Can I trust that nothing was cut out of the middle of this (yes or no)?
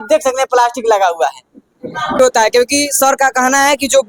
no